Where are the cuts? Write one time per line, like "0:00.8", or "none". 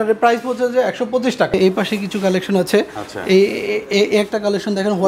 0:01.5